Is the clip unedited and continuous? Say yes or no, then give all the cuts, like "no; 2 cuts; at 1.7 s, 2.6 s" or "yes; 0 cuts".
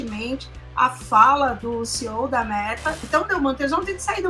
no; 1 cut; at 3.0 s